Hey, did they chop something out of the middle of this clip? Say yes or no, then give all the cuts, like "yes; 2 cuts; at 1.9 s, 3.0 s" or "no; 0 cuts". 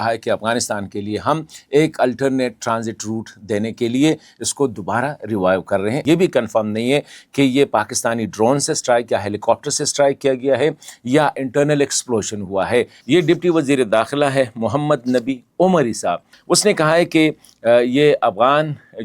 yes; 3 cuts; at 6.0 s, 13.0 s, 16.3 s